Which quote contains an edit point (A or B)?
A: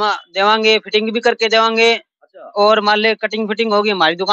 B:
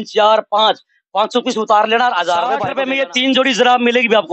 B